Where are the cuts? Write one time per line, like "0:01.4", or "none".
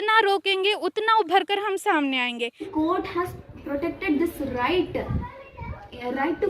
0:02.6